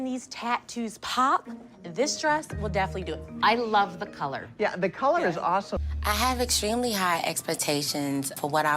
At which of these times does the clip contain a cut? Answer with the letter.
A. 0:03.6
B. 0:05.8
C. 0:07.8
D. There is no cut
B